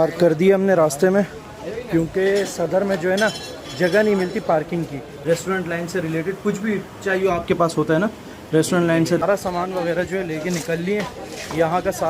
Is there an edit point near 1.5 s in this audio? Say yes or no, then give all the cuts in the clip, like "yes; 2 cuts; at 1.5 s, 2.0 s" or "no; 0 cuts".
no; 2 cuts; at 5.1 s, 9.2 s